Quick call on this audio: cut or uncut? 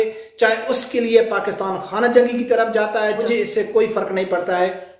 cut